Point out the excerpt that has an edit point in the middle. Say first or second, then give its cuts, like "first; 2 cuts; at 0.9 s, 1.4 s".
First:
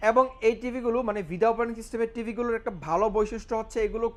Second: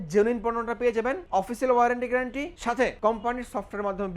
second; 2 cuts; at 1.2 s, 2.8 s